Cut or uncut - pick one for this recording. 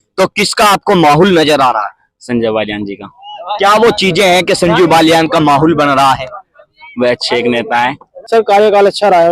cut